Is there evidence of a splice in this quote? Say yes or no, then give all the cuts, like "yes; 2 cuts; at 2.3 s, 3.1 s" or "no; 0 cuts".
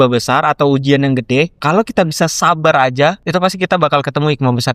yes; 2 cuts; at 1.6 s, 3.2 s